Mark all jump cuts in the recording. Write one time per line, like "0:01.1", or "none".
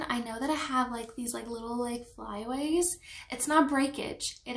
none